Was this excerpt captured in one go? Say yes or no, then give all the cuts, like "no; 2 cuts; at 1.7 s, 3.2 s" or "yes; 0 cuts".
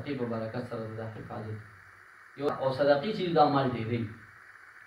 no; 1 cut; at 2.5 s